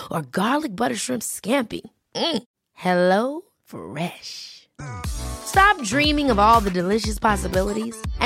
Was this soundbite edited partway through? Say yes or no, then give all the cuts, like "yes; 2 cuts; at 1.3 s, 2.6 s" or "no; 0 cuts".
no; 0 cuts